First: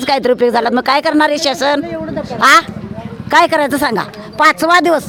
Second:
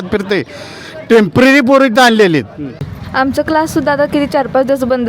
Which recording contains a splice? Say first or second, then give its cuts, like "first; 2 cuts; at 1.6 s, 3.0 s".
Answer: second; 1 cut; at 2.8 s